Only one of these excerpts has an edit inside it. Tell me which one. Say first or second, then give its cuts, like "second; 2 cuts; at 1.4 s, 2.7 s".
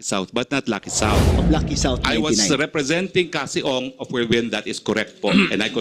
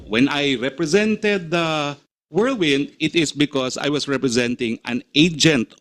first; 1 cut; at 1.3 s